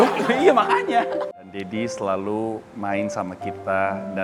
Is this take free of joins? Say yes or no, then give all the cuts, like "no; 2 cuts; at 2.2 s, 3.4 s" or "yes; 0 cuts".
no; 1 cut; at 1.3 s